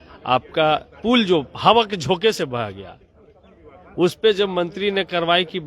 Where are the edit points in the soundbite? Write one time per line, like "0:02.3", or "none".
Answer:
none